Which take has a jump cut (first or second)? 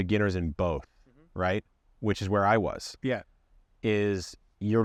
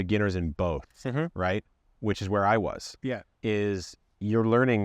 second